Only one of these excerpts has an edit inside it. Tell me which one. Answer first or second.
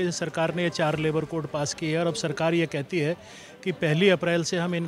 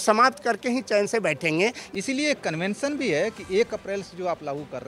second